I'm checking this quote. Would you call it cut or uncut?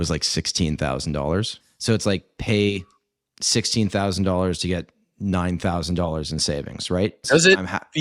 cut